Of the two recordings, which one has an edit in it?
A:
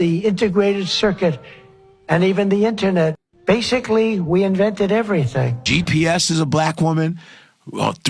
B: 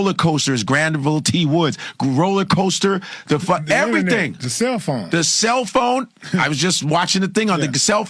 A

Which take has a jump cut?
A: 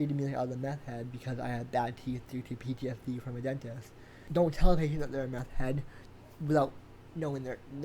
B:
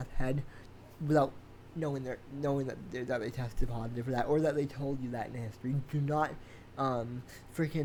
A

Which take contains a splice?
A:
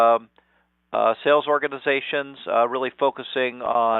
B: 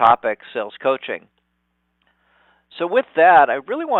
A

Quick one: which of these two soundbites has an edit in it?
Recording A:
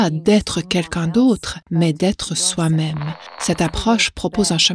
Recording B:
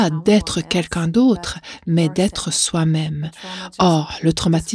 A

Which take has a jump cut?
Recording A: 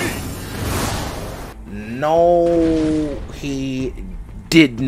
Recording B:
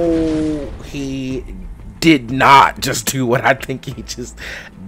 A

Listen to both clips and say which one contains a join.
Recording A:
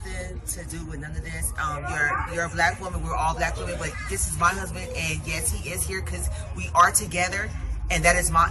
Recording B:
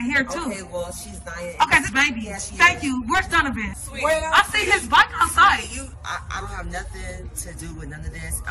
B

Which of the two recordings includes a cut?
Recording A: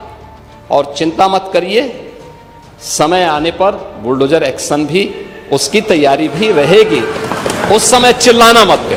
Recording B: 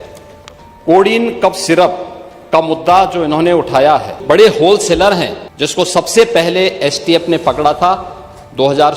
B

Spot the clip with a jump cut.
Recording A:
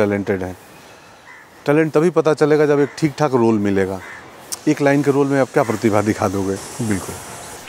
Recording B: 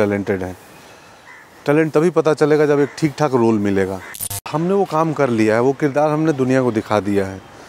B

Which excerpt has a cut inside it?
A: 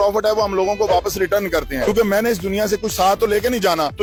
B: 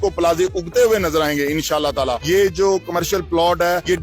B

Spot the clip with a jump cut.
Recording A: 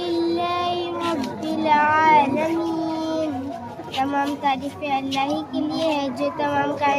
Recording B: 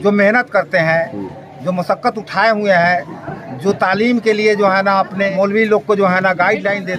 B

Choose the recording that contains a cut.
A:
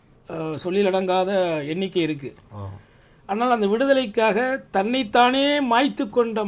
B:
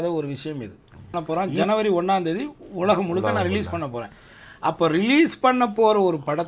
B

